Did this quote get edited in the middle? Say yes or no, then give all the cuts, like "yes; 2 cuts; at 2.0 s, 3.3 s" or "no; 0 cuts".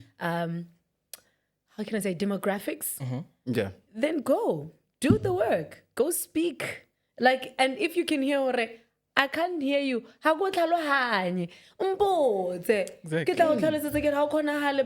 no; 0 cuts